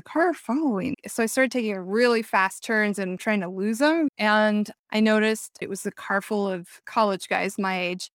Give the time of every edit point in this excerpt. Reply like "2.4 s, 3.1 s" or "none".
3.2 s, 4.1 s, 5.5 s, 6.8 s